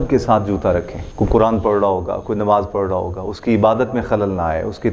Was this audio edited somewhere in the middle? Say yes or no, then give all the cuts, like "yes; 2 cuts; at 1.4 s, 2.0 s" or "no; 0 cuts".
yes; 1 cut; at 1.0 s